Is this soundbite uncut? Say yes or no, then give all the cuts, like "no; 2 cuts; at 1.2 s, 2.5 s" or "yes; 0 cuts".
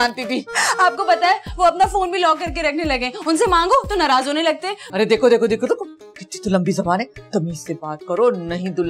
no; 1 cut; at 4.8 s